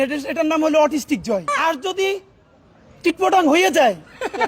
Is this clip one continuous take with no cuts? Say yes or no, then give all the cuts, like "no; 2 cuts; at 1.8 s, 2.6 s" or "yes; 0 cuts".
no; 1 cut; at 1.5 s